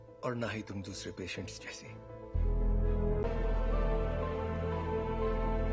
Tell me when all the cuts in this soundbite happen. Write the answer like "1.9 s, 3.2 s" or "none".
3.2 s